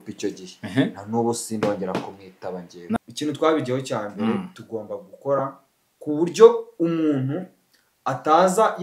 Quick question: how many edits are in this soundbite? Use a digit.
1